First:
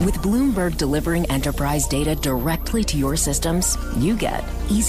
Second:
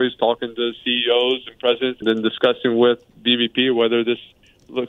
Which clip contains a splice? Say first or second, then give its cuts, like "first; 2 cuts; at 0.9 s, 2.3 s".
second; 1 cut; at 2.0 s